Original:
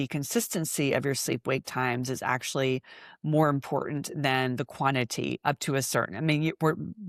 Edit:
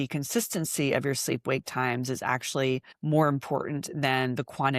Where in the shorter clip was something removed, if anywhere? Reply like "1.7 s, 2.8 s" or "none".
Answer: 2.9 s